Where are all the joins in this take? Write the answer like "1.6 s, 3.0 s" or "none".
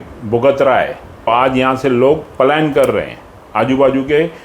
1.3 s